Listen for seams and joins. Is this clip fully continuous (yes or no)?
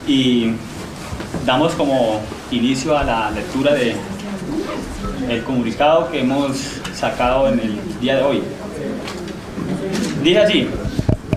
yes